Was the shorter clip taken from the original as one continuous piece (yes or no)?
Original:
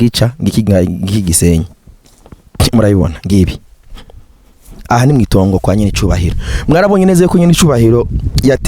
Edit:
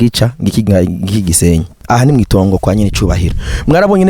no